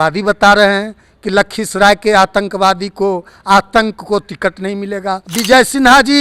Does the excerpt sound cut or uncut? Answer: cut